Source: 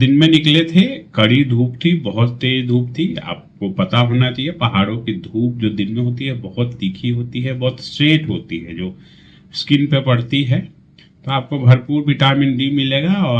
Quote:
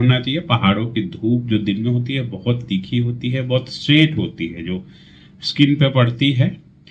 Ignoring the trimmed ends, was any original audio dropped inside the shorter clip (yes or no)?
no